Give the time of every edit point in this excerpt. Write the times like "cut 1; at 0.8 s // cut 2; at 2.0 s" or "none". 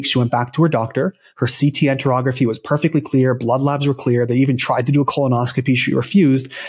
none